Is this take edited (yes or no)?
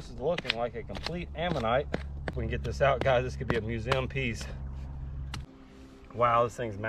yes